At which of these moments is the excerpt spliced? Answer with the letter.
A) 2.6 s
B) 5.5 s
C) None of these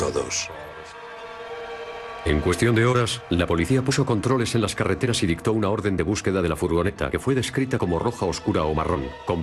B